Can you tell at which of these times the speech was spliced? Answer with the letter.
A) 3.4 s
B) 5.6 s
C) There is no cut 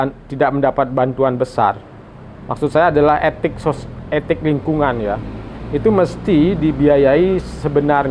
C